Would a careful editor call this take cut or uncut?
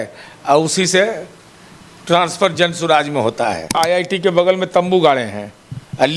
cut